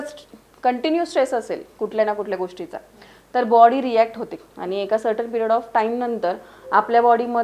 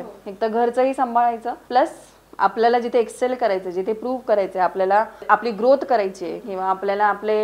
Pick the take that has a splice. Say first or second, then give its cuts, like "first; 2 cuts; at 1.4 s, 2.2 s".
second; 2 cuts; at 1.5 s, 5.2 s